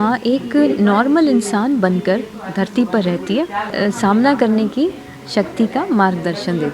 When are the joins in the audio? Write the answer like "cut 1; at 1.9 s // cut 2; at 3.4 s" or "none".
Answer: cut 1; at 3.7 s